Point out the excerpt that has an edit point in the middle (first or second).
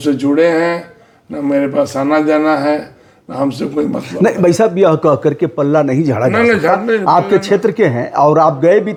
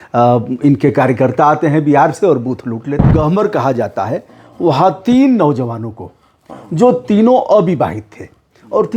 second